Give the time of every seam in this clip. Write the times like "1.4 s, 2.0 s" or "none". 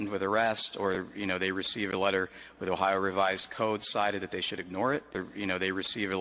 5.3 s